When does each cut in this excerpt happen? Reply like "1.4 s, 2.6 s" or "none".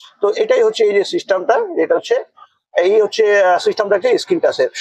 none